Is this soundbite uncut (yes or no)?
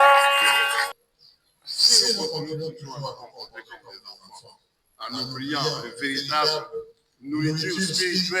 no